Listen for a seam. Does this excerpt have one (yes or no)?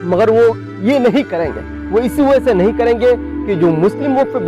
no